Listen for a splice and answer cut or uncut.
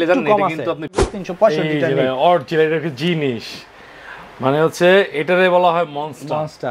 cut